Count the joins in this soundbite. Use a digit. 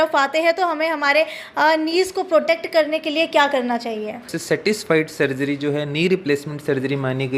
1